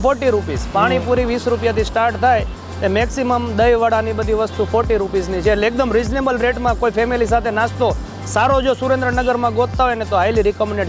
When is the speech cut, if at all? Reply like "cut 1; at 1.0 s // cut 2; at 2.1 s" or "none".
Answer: none